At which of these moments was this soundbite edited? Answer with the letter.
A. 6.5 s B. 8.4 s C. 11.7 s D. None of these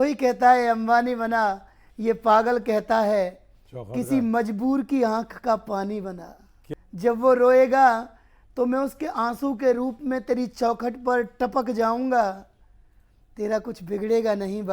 A